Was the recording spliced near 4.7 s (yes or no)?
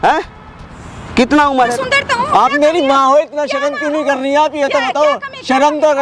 no